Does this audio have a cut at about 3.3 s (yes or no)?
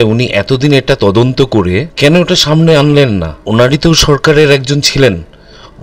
yes